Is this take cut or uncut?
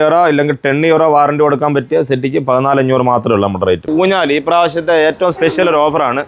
cut